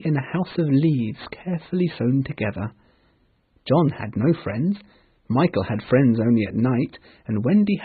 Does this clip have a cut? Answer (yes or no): no